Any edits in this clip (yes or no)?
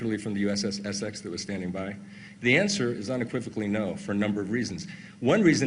yes